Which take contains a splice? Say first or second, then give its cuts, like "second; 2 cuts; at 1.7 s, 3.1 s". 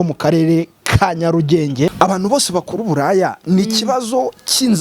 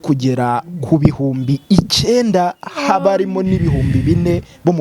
first; 1 cut; at 1.9 s